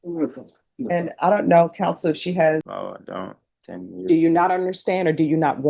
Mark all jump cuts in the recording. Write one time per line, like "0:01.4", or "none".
0:02.8